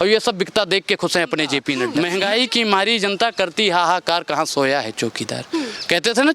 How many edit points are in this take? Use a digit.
1